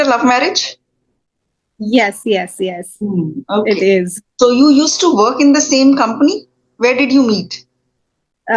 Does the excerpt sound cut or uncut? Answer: uncut